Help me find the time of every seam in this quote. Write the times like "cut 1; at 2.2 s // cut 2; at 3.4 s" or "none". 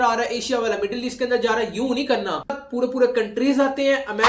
cut 1; at 2.6 s